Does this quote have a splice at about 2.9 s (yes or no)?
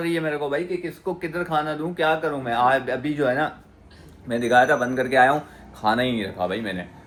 no